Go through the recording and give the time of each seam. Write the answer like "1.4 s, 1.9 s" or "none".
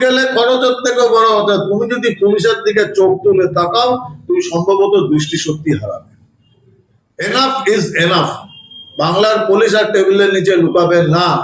none